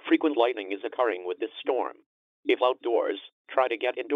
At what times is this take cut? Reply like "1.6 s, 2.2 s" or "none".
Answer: 1.7 s